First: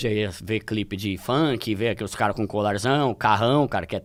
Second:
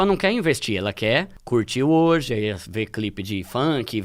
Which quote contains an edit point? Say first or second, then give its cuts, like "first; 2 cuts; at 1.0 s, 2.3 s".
second; 1 cut; at 1.4 s